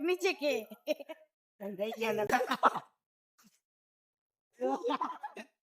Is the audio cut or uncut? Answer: cut